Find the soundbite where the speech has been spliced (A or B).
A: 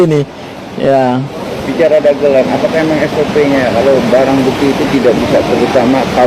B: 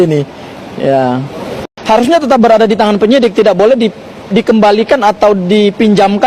B